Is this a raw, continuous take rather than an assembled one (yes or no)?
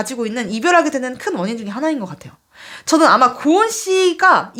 yes